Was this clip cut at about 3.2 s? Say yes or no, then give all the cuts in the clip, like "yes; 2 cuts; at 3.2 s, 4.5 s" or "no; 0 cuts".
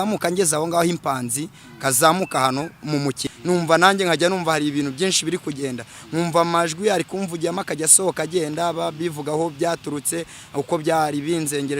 yes; 1 cut; at 3.2 s